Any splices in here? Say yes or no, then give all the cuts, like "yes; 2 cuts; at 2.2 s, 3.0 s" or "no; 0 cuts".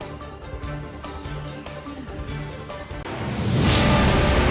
yes; 2 cuts; at 0.8 s, 3.0 s